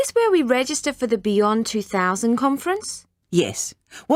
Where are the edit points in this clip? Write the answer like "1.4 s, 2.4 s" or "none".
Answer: none